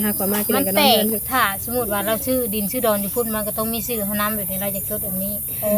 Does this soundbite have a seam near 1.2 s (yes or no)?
yes